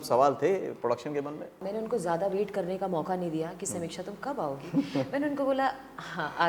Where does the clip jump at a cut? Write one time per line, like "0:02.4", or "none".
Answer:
0:01.6